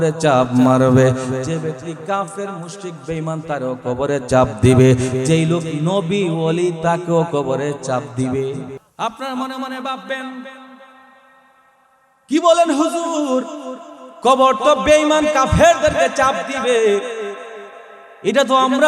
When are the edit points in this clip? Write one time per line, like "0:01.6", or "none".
0:08.8